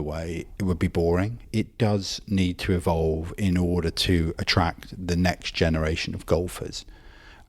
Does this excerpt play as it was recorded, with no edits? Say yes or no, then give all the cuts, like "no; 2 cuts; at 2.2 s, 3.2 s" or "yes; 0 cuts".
no; 1 cut; at 1.4 s